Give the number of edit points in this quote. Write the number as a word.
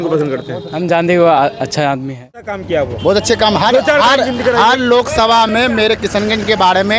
one